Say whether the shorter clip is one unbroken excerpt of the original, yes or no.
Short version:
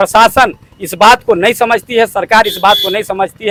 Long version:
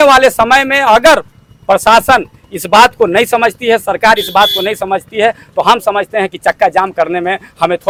yes